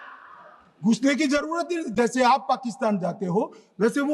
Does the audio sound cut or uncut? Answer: uncut